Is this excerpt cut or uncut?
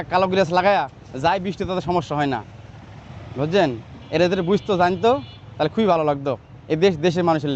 uncut